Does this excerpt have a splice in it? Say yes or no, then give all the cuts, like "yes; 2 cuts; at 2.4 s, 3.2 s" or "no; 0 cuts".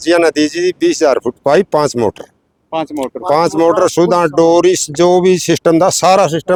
no; 0 cuts